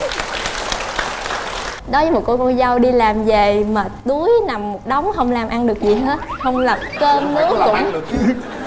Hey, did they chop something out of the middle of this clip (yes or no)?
yes